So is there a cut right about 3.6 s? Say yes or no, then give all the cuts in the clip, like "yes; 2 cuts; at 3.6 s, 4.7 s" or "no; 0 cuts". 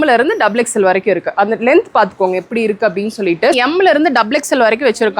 yes; 1 cut; at 3.6 s